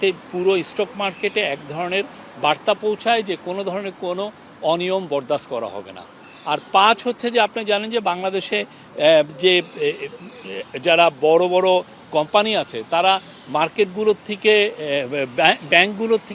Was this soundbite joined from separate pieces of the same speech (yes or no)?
no